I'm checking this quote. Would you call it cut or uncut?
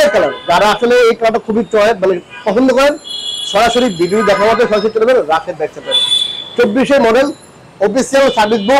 uncut